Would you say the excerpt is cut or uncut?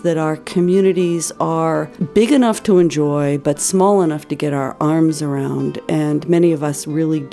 cut